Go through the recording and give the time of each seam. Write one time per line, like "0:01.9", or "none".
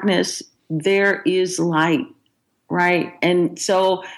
none